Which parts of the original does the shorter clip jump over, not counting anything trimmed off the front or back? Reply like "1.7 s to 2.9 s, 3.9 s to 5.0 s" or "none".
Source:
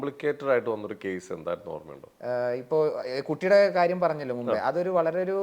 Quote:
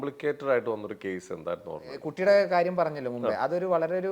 2.0 s to 3.2 s